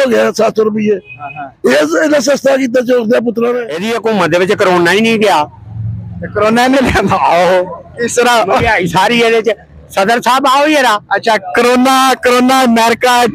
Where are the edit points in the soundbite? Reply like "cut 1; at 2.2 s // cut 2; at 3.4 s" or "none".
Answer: cut 1; at 3.9 s